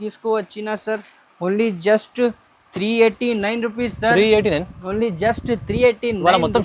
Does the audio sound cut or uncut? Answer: uncut